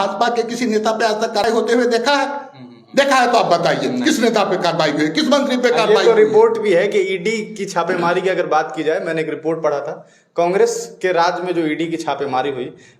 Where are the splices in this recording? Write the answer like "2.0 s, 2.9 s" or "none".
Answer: 1.4 s